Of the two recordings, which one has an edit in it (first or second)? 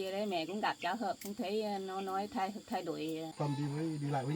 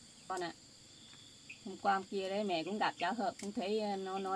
first